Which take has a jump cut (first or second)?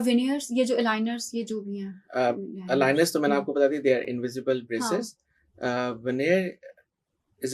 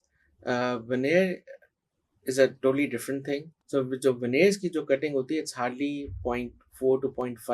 second